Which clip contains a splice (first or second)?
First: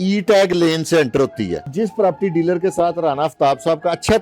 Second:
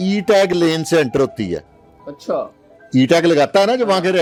first